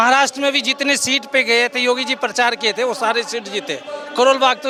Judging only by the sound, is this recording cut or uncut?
uncut